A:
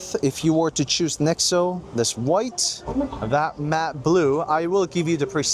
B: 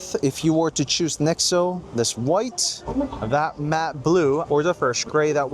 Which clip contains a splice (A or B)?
B